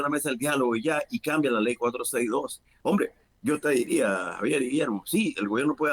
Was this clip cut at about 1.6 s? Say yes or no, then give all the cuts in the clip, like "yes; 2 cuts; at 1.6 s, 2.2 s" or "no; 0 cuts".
no; 1 cut; at 3.0 s